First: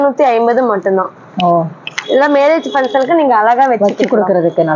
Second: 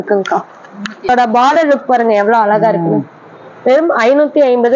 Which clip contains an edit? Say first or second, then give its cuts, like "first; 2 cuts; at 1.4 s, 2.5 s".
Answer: second; 1 cut; at 1.1 s